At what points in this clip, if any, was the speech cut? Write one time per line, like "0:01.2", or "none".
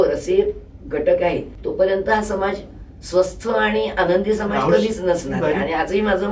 0:01.6